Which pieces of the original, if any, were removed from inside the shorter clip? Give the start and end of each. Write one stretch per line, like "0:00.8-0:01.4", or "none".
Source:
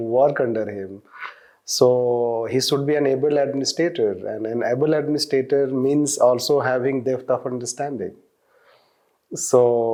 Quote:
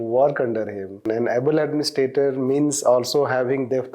0:00.9-0:04.3